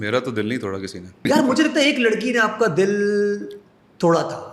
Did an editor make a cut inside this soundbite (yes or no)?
yes